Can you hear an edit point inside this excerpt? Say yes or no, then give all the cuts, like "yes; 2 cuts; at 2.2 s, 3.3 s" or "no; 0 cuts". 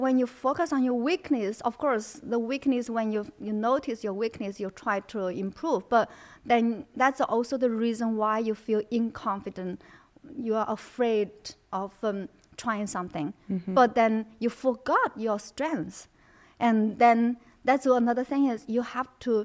no; 0 cuts